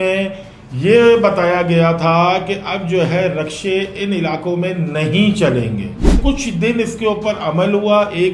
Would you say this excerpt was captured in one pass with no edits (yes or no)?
no